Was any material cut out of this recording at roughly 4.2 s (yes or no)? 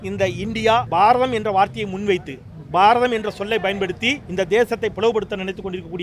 yes